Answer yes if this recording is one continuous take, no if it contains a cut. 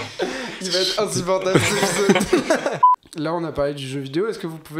no